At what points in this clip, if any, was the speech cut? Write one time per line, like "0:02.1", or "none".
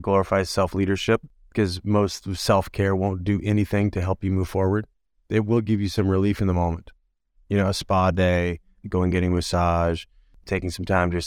0:01.4
0:10.3